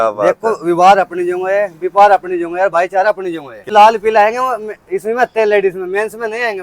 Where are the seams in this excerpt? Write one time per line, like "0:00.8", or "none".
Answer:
0:03.7